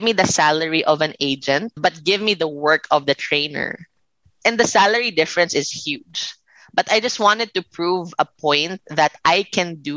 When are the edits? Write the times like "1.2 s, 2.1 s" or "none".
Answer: 1.7 s, 4.4 s

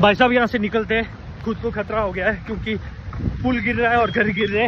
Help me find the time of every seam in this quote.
none

